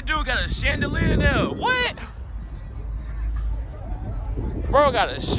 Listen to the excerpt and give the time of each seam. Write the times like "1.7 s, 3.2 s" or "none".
none